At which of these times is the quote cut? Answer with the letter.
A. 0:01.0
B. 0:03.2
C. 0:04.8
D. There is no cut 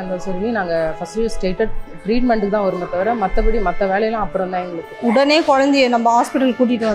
C